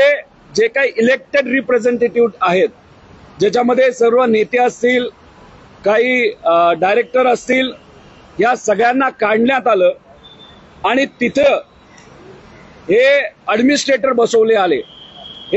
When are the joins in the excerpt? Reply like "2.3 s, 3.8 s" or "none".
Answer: none